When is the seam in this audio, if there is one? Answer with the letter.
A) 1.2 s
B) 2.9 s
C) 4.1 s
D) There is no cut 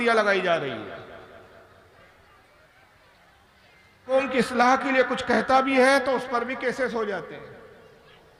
C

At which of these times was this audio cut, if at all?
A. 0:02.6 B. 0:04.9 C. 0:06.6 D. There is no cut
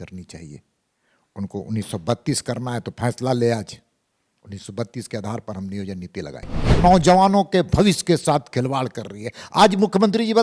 C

